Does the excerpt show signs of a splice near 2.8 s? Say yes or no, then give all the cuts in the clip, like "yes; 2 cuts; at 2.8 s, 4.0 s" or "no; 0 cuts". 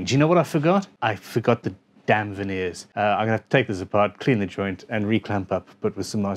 yes; 2 cuts; at 0.9 s, 2.8 s